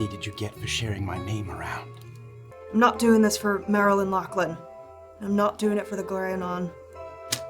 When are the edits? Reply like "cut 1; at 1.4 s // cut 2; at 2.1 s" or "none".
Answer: cut 1; at 2.5 s